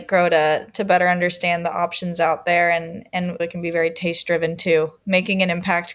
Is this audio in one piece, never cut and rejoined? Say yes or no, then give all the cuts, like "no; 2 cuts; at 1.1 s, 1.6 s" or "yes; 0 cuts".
no; 1 cut; at 5.0 s